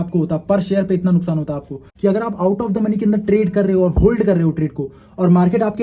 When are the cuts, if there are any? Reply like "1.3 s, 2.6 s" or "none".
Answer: 1.8 s